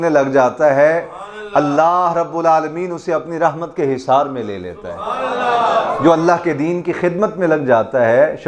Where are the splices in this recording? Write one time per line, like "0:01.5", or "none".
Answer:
none